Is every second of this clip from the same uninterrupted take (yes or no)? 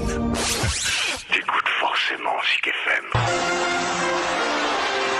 yes